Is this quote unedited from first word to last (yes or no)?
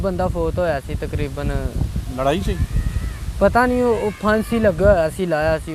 yes